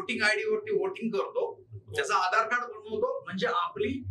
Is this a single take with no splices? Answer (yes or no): yes